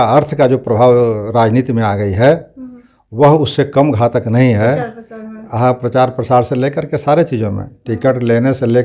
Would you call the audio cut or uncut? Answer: uncut